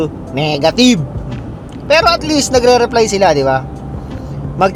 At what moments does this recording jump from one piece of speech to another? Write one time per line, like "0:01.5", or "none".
none